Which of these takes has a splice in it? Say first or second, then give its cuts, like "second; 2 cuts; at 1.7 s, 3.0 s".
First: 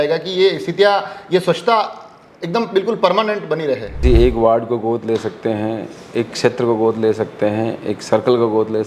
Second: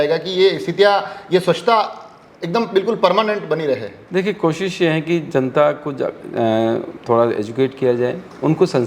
first; 1 cut; at 4.0 s